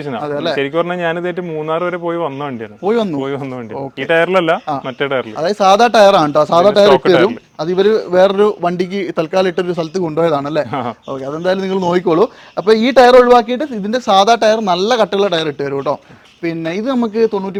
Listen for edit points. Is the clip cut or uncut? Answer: uncut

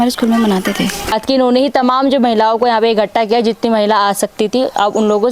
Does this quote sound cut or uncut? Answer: cut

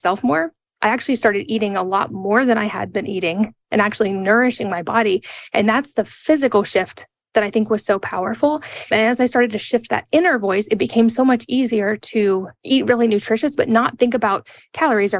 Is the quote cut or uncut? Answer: cut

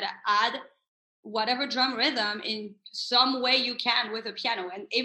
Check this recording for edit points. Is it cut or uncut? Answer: uncut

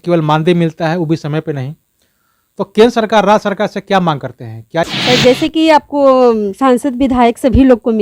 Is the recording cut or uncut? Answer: cut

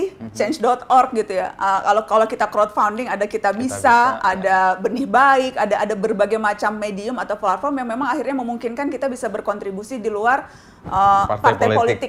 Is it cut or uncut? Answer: uncut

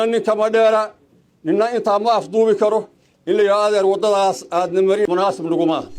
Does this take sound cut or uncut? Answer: cut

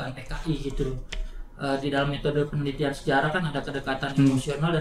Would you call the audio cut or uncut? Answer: uncut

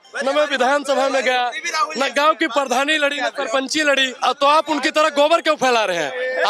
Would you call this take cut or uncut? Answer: cut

